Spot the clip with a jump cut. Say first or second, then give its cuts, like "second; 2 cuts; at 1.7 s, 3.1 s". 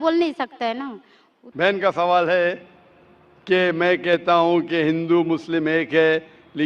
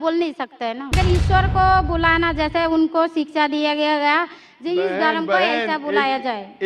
second; 1 cut; at 0.9 s